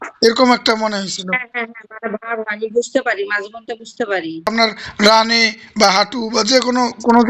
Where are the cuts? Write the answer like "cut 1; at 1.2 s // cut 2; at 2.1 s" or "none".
cut 1; at 4.5 s